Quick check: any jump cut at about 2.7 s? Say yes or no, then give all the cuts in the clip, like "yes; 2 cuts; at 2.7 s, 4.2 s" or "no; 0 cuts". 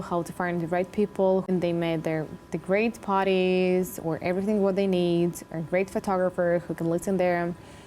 no; 1 cut; at 1.4 s